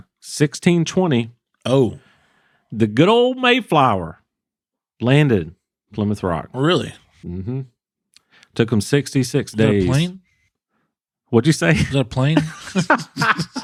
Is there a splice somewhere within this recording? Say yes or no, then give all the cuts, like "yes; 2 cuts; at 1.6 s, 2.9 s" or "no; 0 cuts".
no; 0 cuts